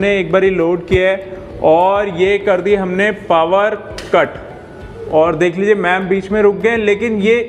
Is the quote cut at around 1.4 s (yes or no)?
no